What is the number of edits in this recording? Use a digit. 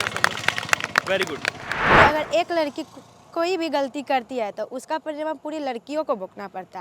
1